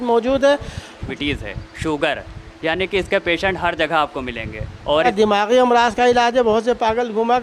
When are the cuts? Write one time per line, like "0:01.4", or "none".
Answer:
0:01.1
0:05.1